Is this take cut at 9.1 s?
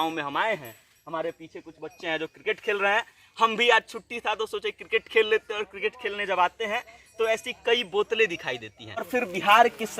yes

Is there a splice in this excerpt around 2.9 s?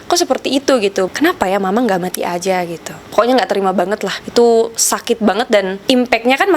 yes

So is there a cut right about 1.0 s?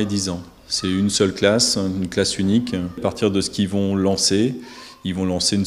no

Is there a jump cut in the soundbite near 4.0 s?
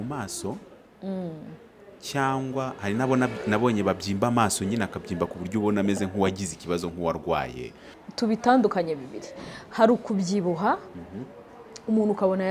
no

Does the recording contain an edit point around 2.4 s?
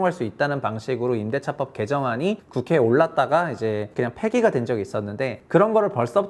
yes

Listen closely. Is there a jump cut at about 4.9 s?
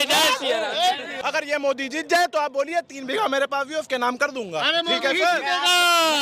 no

